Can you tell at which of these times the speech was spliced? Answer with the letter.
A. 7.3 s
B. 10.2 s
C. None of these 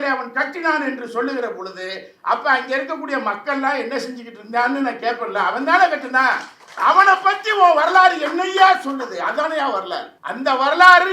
B